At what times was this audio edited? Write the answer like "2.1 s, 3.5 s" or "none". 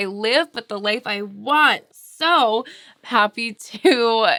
none